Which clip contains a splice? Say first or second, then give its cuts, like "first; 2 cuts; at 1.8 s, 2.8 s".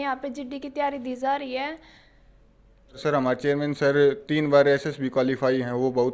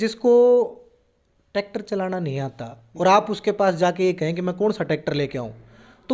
first; 1 cut; at 3.0 s